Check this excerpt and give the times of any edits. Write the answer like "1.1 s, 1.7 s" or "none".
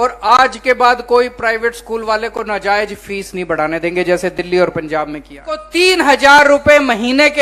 5.7 s